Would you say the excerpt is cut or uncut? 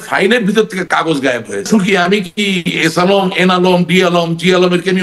cut